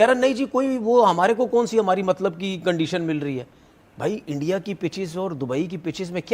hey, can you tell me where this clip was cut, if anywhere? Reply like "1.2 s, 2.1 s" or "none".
none